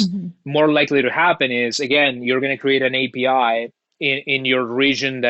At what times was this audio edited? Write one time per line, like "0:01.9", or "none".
none